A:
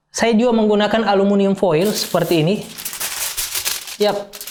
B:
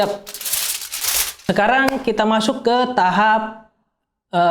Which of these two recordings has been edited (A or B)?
B